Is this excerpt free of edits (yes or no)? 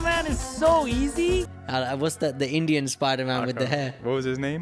no